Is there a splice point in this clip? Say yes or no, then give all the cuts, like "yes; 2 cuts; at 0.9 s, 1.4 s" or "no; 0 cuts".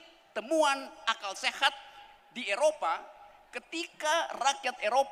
no; 0 cuts